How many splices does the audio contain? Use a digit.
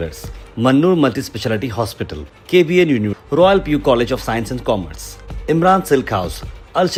0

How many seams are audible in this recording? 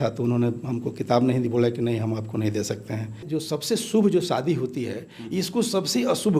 1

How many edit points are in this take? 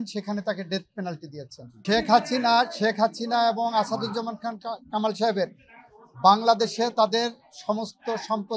1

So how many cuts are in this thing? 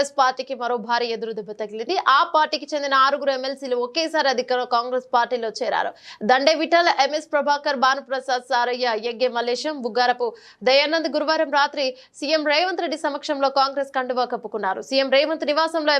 0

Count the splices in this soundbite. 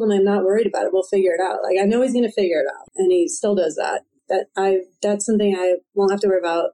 2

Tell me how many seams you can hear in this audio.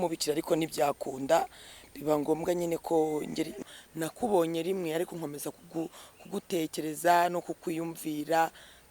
1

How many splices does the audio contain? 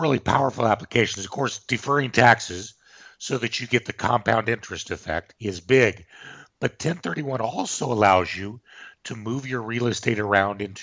1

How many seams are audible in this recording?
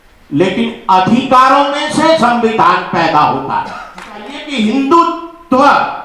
1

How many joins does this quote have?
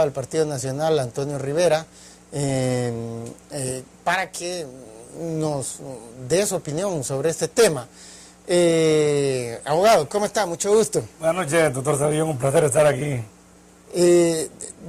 0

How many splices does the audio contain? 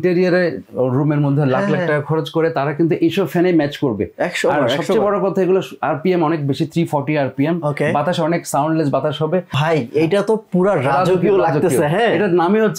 1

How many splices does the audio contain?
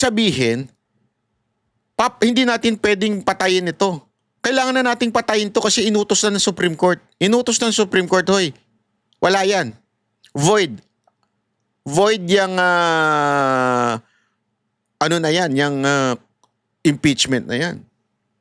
0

